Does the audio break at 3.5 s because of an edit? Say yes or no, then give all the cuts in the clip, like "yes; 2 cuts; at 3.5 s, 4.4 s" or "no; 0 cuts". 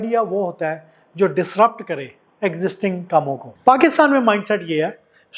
yes; 1 cut; at 3.5 s